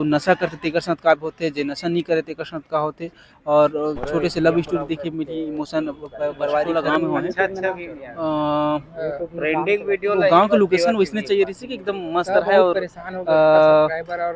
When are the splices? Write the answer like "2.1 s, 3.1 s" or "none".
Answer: 6.7 s